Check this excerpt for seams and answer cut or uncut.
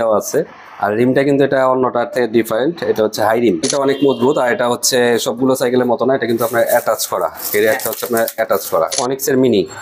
cut